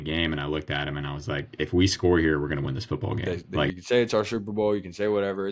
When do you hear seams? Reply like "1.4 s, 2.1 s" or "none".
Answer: 3.7 s